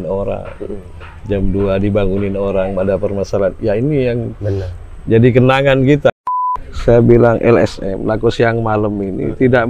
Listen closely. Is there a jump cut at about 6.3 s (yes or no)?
yes